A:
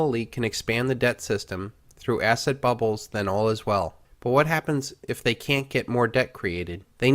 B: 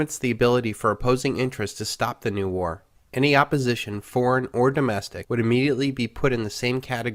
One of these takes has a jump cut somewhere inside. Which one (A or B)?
A